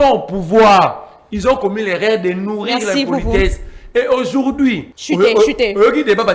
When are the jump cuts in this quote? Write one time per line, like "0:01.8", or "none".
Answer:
0:04.9